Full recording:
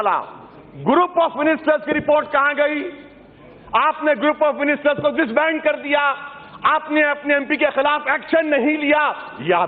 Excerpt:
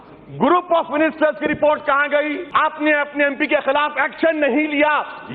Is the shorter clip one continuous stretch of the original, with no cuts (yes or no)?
no